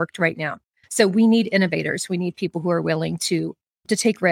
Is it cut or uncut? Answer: uncut